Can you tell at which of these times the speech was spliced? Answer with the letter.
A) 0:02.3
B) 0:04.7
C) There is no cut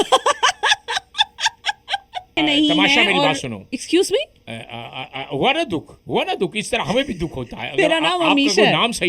A